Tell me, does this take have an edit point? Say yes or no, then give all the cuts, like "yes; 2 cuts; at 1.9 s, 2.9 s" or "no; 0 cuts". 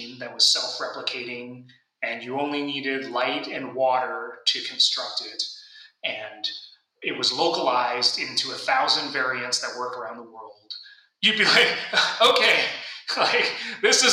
yes; 1 cut; at 11.2 s